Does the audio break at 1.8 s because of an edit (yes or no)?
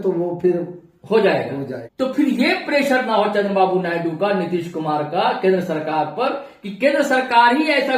yes